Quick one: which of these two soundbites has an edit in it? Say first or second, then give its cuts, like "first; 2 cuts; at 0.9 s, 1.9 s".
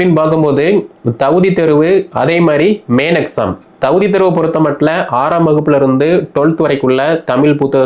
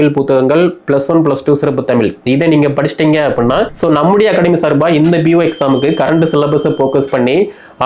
second; 1 cut; at 3.7 s